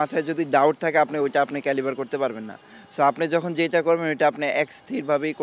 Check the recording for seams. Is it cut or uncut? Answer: uncut